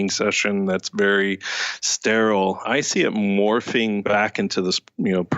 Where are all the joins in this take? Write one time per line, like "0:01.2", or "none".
0:02.6
0:04.0